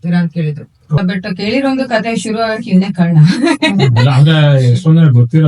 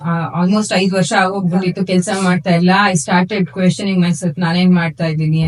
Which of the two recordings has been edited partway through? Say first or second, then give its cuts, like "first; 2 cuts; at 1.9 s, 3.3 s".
first; 1 cut; at 1.0 s